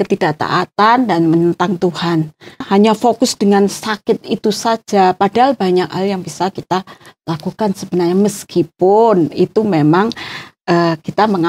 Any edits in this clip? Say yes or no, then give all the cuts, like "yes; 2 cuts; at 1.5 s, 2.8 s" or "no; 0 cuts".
yes; 1 cut; at 2.6 s